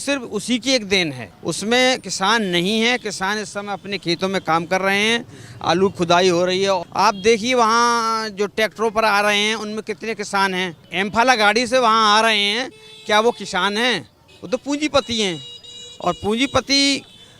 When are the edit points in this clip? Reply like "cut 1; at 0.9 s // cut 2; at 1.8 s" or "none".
cut 1; at 1.3 s // cut 2; at 6.9 s // cut 3; at 10.8 s